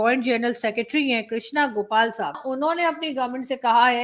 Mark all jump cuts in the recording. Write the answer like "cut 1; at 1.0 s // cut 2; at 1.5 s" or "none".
cut 1; at 2.4 s